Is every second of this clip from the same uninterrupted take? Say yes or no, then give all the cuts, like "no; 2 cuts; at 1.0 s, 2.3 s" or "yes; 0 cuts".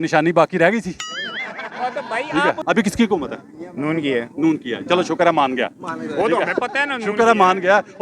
no; 1 cut; at 2.6 s